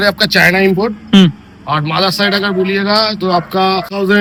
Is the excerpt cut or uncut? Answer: uncut